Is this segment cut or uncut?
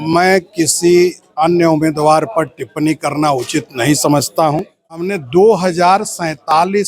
cut